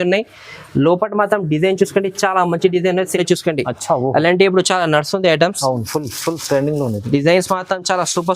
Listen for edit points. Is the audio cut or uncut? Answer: cut